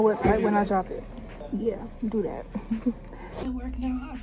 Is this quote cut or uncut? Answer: uncut